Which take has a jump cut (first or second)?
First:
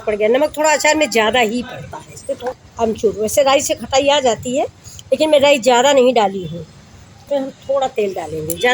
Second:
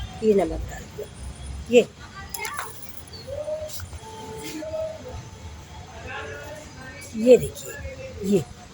first